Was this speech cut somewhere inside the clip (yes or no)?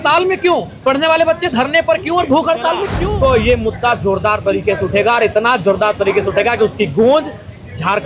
yes